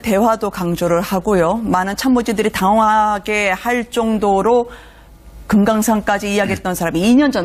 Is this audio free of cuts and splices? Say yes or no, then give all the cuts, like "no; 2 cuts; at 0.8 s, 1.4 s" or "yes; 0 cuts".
yes; 0 cuts